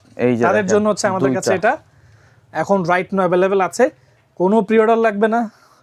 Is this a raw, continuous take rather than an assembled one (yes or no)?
yes